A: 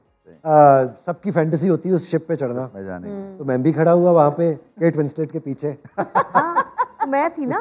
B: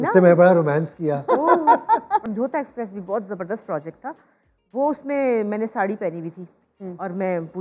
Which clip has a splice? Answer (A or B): B